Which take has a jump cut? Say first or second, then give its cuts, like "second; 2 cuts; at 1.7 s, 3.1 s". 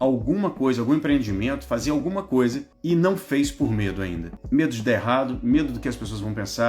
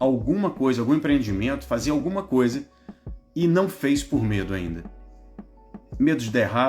first; 2 cuts; at 2.7 s, 4.3 s